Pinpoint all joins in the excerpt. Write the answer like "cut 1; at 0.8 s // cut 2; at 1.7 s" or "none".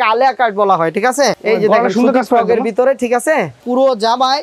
cut 1; at 1.4 s // cut 2; at 3.6 s